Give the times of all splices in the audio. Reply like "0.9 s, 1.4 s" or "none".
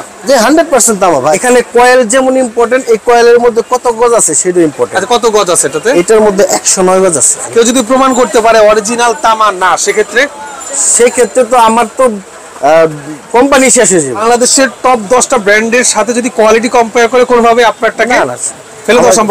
1.3 s, 7.4 s, 14.2 s

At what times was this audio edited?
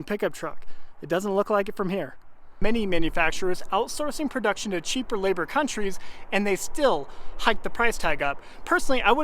2.6 s

